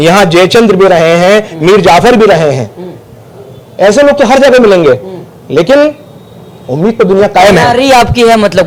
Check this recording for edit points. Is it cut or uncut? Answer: uncut